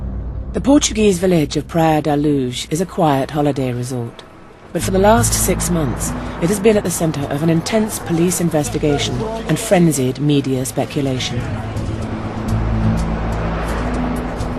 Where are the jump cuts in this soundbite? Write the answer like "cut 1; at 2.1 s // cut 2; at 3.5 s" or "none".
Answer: none